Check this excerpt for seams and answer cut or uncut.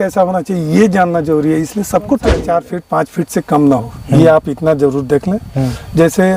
cut